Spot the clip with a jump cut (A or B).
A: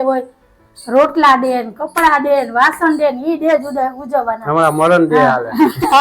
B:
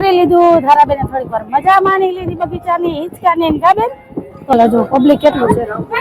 B